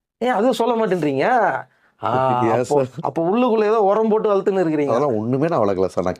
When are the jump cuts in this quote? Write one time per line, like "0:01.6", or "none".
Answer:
none